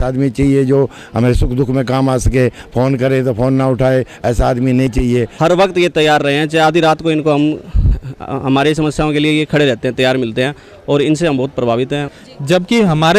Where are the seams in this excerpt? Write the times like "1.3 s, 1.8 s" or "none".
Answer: 4.9 s, 12.1 s